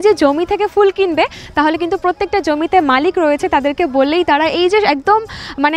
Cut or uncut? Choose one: uncut